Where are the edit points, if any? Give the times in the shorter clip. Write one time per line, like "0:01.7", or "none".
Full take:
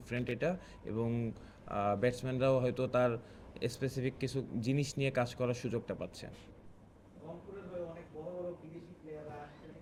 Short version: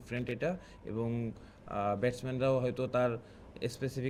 none